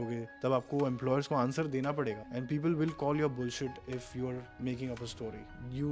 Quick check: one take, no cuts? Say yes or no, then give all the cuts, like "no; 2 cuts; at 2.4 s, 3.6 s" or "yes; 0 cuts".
yes; 0 cuts